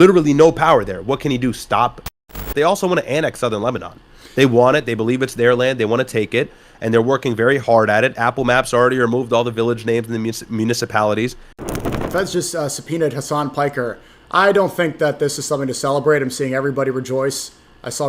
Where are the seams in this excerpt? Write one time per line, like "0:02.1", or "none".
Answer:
0:02.3
0:11.8